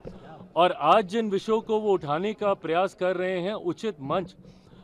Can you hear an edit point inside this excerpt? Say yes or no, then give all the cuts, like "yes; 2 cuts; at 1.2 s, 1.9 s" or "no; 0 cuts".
no; 0 cuts